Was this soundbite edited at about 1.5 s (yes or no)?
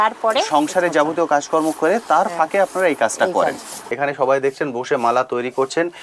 no